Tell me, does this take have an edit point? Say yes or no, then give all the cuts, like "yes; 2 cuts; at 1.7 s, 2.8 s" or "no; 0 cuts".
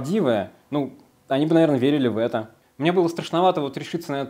yes; 1 cut; at 2.6 s